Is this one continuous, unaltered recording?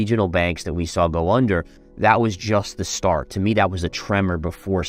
yes; 0 cuts

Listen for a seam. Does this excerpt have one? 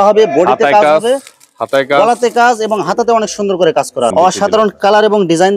yes; 1 cut; at 4.1 s

